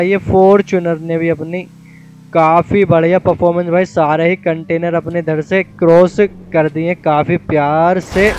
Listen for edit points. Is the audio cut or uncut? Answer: uncut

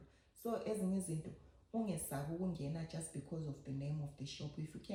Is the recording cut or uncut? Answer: uncut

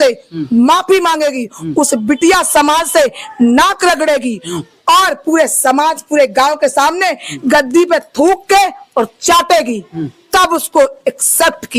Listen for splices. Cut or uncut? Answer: uncut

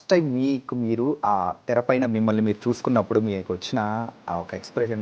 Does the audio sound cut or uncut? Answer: uncut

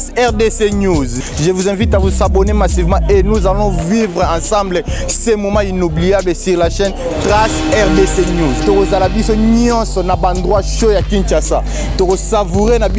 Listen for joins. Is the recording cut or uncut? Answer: uncut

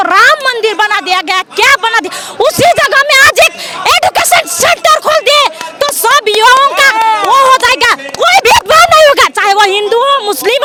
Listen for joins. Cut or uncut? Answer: uncut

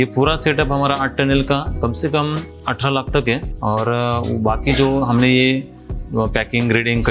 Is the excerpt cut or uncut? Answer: cut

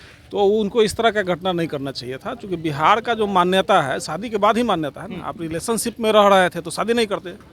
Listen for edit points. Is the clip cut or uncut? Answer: uncut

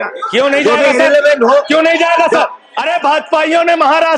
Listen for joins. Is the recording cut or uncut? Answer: cut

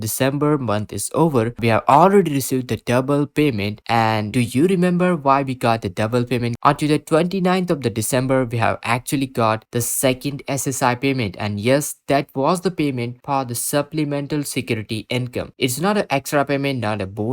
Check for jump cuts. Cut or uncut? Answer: cut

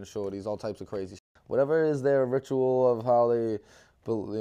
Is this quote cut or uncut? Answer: cut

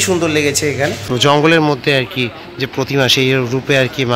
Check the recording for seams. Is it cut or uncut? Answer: cut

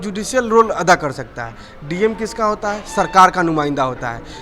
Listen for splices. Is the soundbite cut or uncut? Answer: uncut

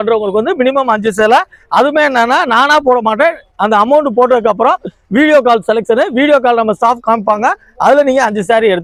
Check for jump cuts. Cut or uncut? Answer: uncut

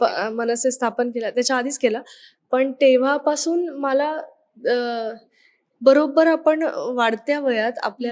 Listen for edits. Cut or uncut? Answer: uncut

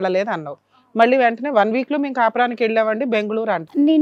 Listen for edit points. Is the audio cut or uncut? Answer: uncut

